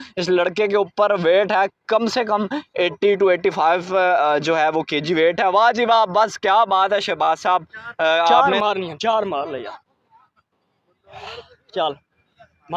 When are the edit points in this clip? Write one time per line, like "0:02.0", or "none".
0:08.4